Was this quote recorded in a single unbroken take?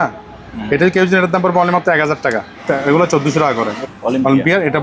no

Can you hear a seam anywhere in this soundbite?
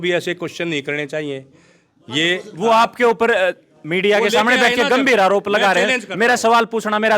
no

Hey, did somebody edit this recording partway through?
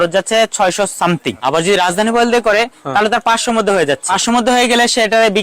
yes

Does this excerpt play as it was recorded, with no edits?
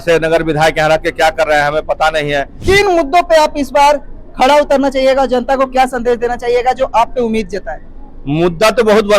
no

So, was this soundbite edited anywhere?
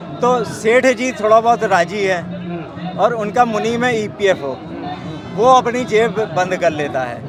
no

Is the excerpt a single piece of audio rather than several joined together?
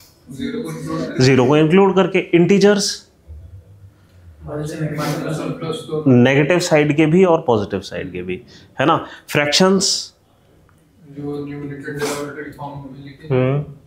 yes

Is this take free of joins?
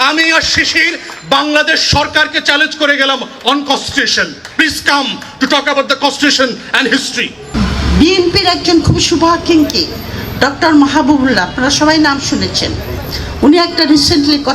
no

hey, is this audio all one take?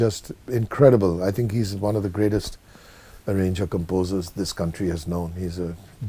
yes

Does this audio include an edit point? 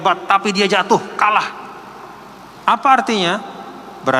no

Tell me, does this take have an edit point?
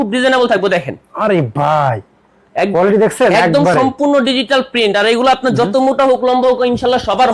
no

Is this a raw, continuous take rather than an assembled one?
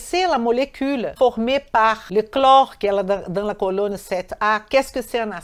no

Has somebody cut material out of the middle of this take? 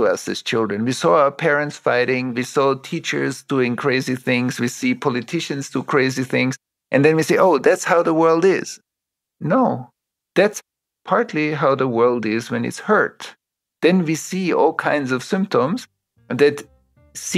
yes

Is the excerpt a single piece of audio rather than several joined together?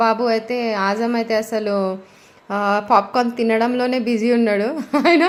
yes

